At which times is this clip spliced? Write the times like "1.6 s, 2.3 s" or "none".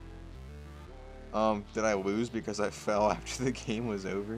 none

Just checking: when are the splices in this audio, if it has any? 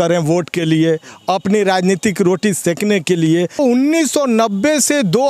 3.6 s

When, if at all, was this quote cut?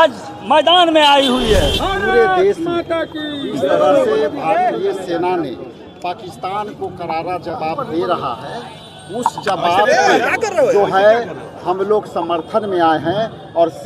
1.8 s

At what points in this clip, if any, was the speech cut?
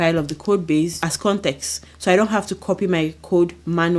1.0 s

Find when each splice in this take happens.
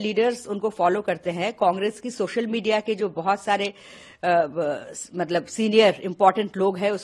none

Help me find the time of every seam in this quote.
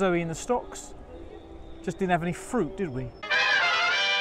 3.2 s

